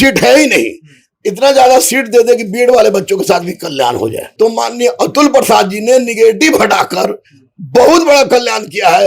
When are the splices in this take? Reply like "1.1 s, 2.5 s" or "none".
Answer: 4.2 s